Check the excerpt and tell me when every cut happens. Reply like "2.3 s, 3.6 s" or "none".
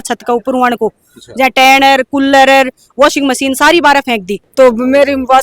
4.4 s